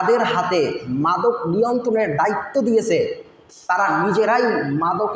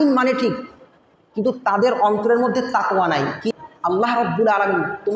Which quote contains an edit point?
second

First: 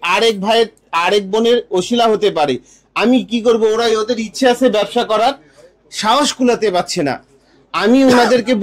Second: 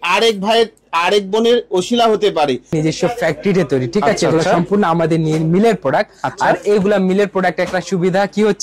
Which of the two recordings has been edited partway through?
second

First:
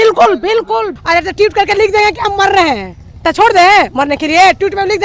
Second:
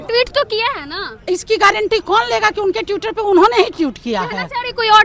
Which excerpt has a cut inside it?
first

